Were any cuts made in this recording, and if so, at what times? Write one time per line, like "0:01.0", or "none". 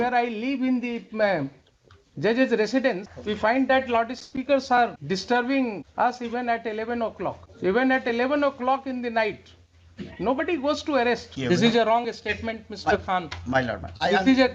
0:03.1
0:05.0
0:05.8
0:07.5
0:11.3